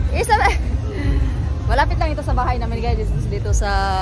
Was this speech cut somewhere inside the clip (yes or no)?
no